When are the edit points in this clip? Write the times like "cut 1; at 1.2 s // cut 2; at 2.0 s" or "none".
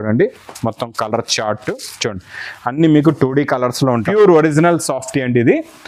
cut 1; at 4.1 s